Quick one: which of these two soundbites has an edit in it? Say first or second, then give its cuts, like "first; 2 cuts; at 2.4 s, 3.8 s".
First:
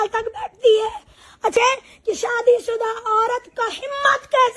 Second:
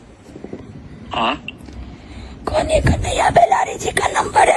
first; 1 cut; at 1.5 s